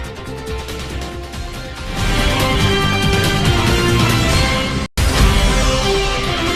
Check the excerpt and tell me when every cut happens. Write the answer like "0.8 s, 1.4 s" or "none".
none